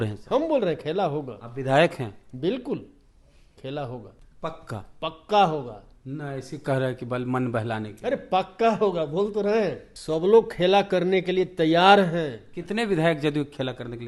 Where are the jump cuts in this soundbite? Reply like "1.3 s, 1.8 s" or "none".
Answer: 4.2 s, 9.9 s